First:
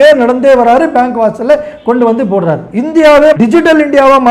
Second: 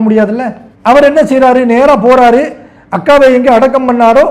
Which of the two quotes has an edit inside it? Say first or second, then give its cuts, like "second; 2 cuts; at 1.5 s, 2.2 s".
first; 2 cuts; at 2.7 s, 3.4 s